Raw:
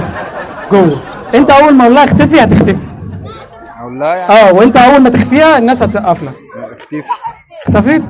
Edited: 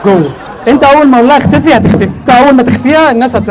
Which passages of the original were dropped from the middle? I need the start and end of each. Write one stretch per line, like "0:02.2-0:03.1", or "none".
0:02.9-0:04.7